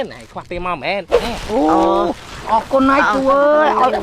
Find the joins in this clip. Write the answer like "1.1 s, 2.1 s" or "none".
1.2 s